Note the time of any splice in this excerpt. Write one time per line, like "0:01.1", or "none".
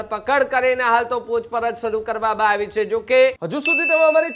0:03.4